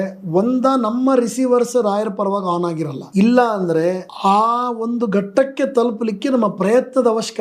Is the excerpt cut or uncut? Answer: cut